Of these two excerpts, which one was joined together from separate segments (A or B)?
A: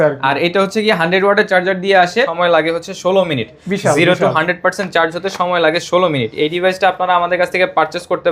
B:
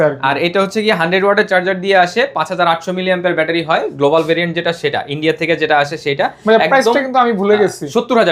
A